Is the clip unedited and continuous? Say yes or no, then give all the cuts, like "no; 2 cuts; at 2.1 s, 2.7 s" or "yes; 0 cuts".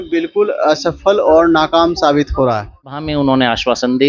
no; 1 cut; at 3.0 s